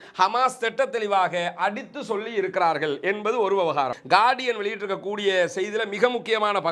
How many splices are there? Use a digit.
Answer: 1